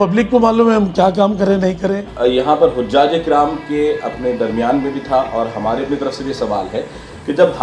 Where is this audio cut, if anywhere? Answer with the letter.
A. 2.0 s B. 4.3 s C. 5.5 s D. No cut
A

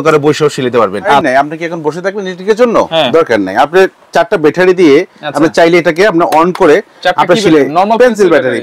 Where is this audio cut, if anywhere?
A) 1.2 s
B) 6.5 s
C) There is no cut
A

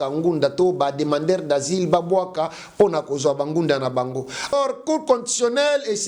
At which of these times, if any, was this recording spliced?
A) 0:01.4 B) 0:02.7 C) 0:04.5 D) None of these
C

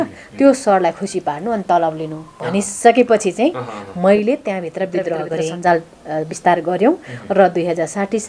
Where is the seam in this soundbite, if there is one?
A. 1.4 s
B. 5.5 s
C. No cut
B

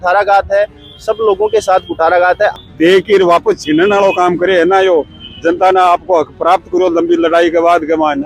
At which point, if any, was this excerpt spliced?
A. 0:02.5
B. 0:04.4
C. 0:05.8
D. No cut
A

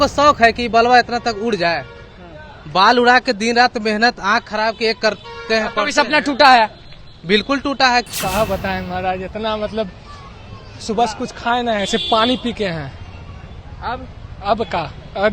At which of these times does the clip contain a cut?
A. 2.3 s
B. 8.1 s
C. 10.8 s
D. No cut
B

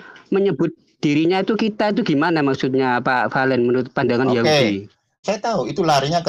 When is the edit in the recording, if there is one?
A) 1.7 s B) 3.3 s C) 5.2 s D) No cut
C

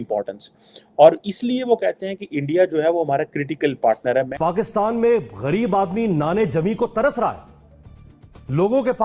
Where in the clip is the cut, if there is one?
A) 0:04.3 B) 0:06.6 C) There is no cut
A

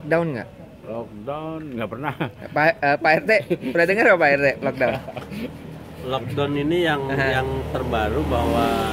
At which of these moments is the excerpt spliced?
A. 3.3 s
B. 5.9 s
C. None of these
C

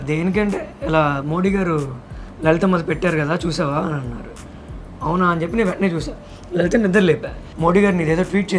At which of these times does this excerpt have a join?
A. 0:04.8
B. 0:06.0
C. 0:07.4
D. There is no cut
C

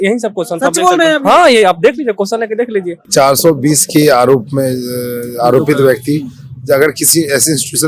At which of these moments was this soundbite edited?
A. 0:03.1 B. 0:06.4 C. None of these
A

